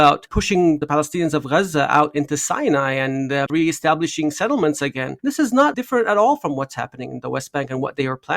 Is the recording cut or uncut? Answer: cut